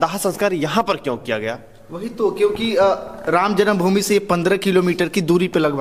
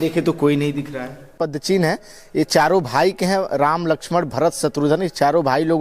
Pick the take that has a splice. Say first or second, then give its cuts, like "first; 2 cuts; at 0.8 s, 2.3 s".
second; 1 cut; at 1.3 s